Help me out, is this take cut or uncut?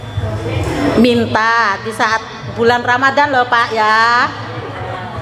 uncut